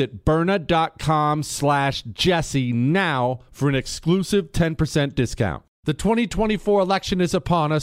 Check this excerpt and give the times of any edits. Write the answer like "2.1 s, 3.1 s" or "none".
5.7 s